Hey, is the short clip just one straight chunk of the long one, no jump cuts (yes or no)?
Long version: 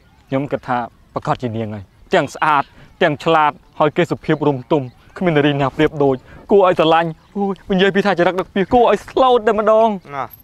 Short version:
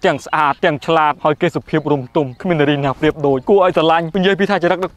no